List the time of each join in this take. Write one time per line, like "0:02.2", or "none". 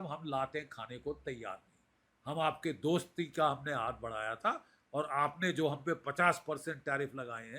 none